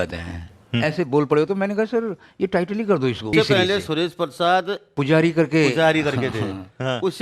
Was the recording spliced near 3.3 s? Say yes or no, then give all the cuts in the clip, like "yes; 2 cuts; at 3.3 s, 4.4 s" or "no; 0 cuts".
yes; 2 cuts; at 3.3 s, 4.9 s